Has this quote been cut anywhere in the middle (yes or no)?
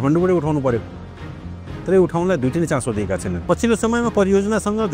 yes